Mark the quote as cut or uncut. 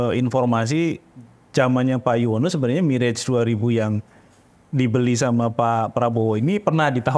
uncut